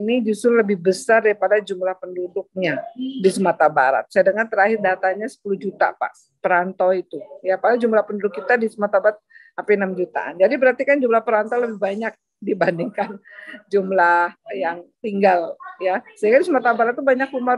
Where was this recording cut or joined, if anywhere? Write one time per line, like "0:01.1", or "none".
none